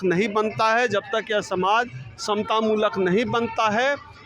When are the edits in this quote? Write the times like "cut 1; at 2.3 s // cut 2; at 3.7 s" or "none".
none